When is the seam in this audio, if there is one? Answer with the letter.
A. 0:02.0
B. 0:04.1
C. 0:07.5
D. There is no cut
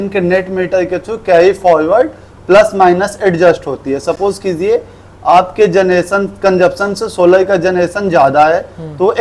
D